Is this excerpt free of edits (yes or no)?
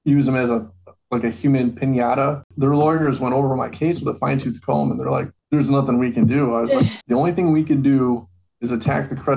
no